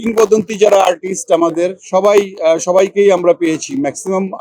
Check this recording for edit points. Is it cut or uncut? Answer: uncut